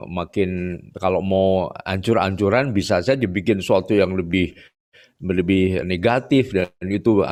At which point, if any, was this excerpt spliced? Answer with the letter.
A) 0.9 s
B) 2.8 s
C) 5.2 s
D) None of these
D